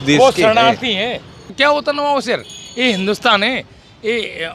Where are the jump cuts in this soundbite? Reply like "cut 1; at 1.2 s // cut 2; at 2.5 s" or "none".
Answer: cut 1; at 1.4 s